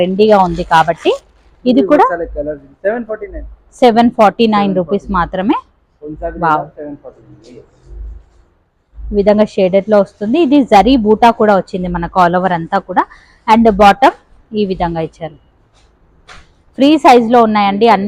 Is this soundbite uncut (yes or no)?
yes